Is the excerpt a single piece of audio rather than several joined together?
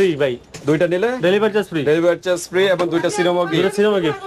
yes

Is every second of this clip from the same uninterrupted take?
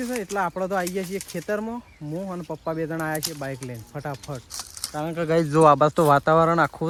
yes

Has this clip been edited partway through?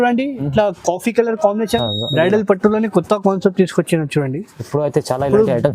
yes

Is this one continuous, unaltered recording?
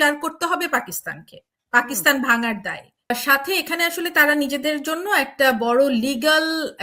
no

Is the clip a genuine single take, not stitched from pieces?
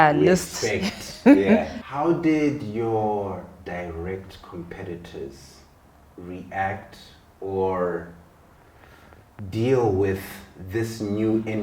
no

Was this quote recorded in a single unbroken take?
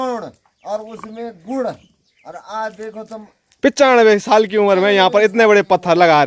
yes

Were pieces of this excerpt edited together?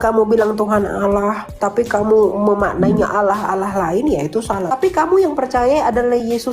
yes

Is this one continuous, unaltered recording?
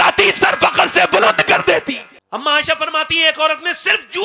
no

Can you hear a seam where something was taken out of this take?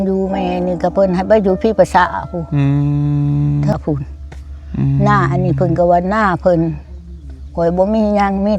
yes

